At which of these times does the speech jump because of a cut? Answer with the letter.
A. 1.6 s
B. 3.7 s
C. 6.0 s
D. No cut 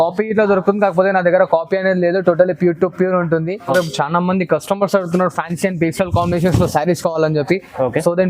B